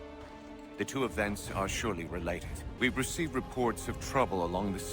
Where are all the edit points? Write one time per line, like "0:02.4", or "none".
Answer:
0:02.7